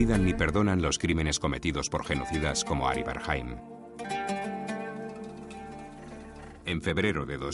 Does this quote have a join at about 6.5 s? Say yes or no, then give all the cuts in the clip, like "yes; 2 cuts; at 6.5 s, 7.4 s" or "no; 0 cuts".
yes; 1 cut; at 6.5 s